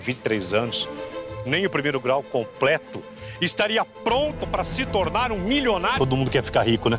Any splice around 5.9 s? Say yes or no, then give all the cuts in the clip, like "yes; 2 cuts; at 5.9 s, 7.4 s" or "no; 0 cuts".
yes; 1 cut; at 5.9 s